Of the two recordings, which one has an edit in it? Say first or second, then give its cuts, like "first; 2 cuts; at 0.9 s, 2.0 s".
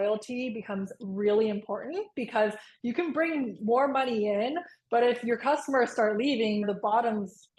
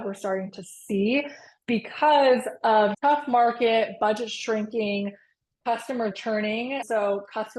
second; 1 cut; at 6.1 s